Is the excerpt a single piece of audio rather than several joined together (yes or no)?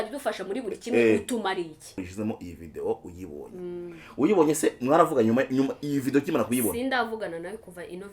no